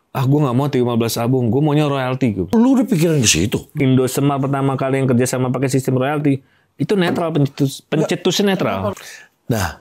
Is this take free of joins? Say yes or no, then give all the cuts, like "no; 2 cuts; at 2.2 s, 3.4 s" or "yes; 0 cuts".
no; 3 cuts; at 2.5 s, 3.7 s, 9.0 s